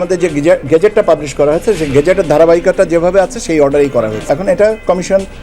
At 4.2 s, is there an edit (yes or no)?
yes